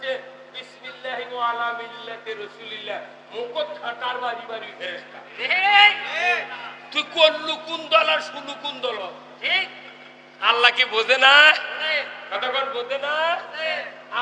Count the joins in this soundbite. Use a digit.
0